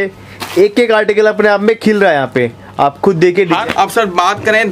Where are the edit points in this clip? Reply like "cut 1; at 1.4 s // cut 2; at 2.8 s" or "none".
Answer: cut 1; at 3.6 s

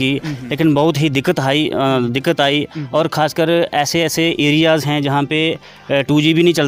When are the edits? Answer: none

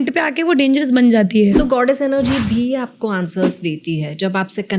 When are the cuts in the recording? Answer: cut 1; at 1.6 s

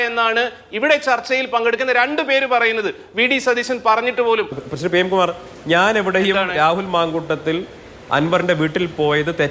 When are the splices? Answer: cut 1; at 4.6 s

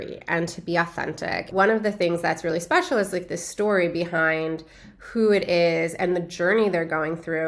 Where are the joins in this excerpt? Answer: cut 1; at 1.5 s

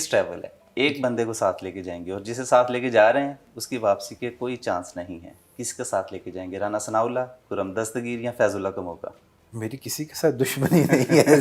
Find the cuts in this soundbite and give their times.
none

